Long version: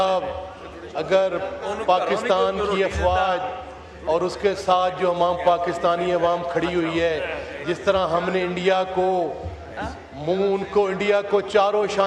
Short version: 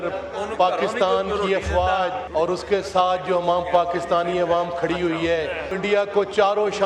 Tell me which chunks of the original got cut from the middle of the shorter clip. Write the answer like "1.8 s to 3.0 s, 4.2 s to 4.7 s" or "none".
3.5 s to 3.9 s, 7.5 s to 10.9 s